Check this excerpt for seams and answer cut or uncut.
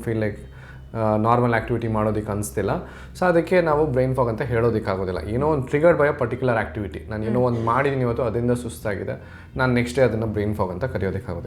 uncut